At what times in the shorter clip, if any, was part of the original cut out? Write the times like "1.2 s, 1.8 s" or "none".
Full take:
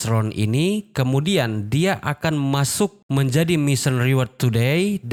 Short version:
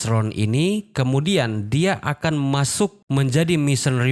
none